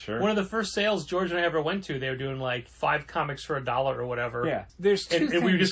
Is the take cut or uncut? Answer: cut